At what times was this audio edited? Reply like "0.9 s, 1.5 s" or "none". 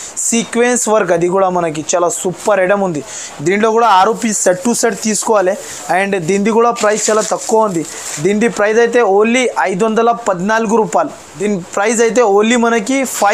none